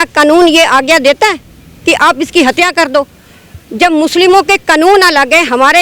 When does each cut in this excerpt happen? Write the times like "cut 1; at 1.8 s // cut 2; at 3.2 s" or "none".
none